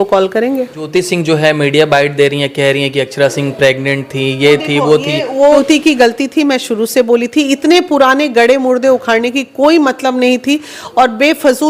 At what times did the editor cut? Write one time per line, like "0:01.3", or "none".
0:00.9
0:05.4